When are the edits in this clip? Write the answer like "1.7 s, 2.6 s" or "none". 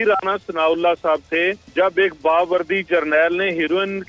1.6 s